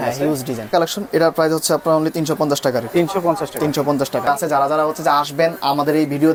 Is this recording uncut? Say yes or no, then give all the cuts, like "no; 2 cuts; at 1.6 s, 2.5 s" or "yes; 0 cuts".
yes; 0 cuts